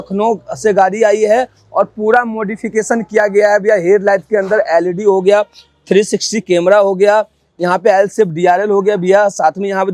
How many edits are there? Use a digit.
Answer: 0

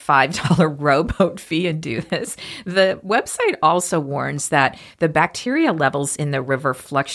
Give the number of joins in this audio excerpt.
0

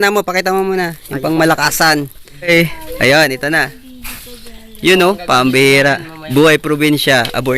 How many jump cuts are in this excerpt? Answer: 2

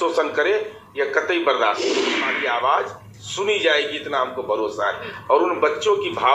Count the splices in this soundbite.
1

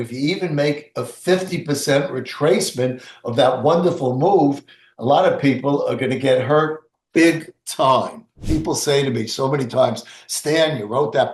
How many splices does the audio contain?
1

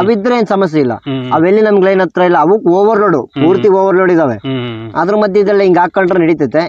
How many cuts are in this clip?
0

